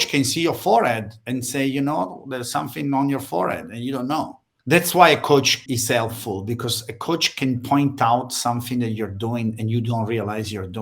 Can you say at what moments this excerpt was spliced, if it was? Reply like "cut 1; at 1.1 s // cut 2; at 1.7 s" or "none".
cut 1; at 4.5 s // cut 2; at 5.6 s

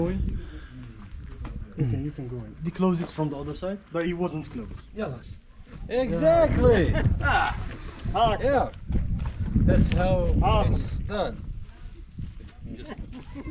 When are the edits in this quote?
cut 1; at 5.2 s

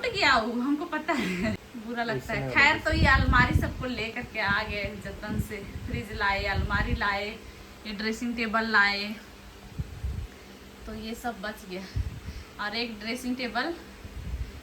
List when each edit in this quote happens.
cut 1; at 1.7 s

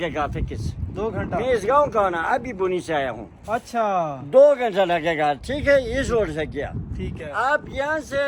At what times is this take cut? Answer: none

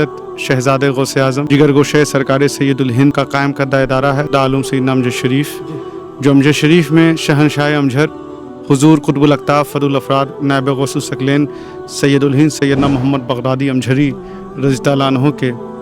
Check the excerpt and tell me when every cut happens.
cut 1; at 1.5 s // cut 2; at 3.1 s

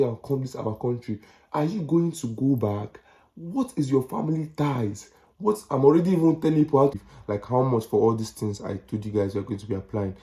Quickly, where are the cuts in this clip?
cut 1; at 6.9 s

